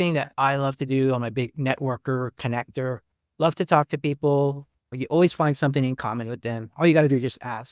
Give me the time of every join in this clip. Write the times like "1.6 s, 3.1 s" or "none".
4.8 s